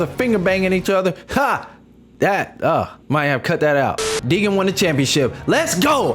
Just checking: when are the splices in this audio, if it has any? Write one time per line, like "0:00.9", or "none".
0:04.2